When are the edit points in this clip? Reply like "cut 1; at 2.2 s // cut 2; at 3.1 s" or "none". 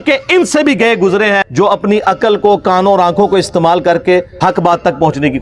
cut 1; at 1.5 s // cut 2; at 4.3 s